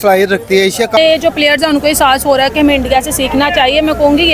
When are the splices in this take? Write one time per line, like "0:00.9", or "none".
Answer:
0:01.0